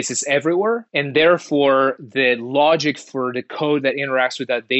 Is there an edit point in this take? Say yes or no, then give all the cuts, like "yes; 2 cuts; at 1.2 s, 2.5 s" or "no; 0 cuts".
yes; 1 cut; at 0.9 s